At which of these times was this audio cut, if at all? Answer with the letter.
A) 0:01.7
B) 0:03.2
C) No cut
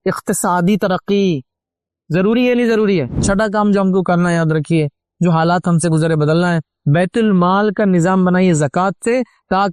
B